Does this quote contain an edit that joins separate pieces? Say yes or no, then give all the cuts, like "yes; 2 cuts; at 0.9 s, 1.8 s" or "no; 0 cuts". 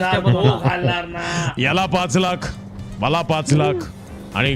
yes; 1 cut; at 1.5 s